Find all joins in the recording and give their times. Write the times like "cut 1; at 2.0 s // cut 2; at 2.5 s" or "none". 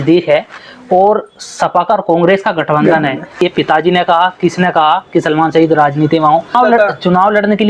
cut 1; at 3.4 s // cut 2; at 6.5 s